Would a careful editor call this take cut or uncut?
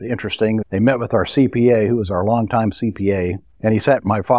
cut